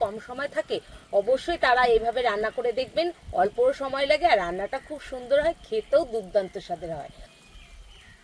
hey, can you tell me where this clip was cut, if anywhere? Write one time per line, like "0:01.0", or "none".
0:07.3